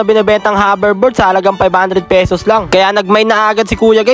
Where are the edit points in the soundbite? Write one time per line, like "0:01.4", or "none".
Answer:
0:02.7